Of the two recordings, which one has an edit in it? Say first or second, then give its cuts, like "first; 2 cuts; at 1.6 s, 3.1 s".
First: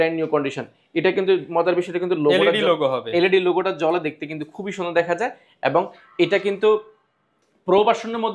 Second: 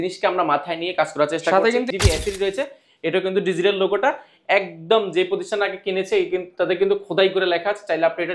second; 1 cut; at 1.9 s